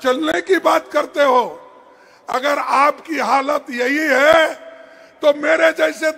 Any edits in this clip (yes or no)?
no